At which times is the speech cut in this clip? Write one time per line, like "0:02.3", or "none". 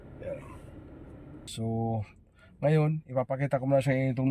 0:01.5